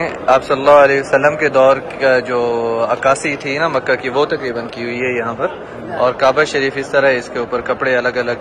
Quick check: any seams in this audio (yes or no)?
no